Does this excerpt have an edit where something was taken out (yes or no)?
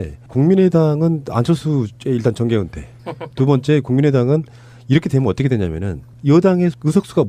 yes